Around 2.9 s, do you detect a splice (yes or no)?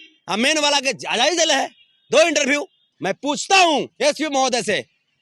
yes